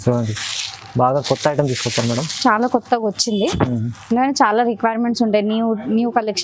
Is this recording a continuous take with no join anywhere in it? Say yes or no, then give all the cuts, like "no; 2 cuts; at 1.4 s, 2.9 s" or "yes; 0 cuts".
yes; 0 cuts